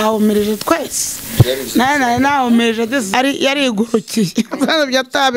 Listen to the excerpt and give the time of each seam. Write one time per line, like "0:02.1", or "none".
0:03.1